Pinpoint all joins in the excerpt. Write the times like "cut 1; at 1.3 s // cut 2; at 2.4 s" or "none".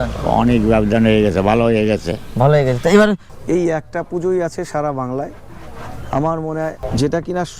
cut 1; at 3.3 s // cut 2; at 6.9 s